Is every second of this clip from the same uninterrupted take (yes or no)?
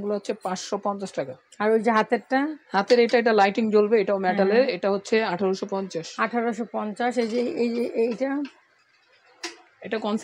yes